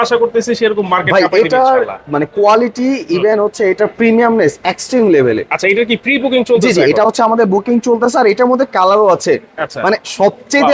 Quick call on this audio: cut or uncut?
uncut